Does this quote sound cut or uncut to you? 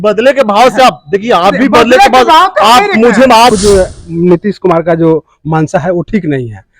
cut